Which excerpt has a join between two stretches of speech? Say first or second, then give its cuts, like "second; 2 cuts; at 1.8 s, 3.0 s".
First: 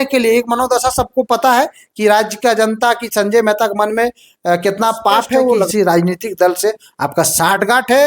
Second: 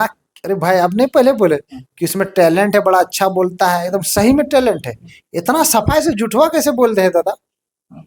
first; 1 cut; at 5.7 s